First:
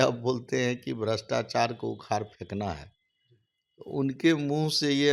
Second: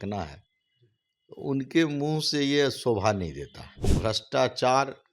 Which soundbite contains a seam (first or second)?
second